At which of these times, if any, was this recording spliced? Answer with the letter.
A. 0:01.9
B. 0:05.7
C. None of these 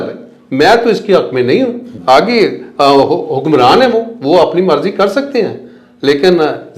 A